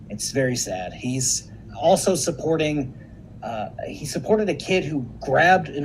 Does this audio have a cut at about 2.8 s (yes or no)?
no